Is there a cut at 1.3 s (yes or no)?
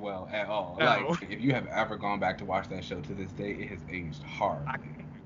yes